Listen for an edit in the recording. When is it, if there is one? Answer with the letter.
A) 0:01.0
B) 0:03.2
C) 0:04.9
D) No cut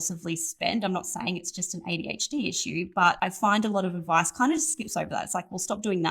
B